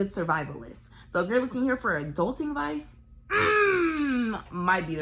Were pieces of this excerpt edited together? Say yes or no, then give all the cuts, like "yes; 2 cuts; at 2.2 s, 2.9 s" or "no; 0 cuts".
no; 0 cuts